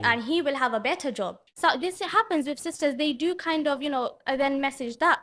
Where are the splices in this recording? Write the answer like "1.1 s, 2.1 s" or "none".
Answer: 1.4 s